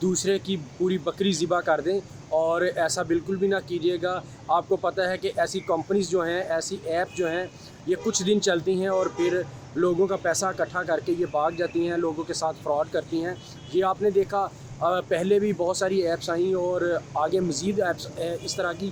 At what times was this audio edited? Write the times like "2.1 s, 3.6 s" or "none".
none